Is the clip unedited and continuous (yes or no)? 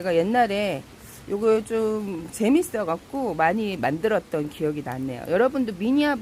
yes